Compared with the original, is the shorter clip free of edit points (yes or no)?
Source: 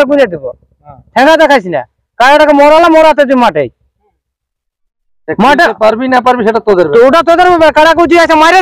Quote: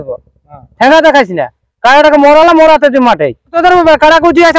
no